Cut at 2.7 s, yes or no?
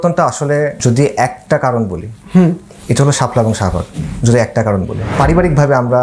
no